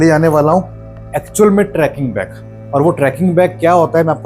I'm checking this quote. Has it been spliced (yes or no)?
no